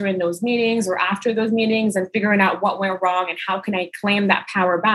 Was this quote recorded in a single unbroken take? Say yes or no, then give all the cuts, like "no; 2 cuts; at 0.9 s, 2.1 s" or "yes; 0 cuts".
yes; 0 cuts